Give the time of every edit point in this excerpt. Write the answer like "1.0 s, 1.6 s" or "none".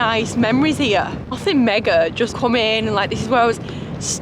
2.3 s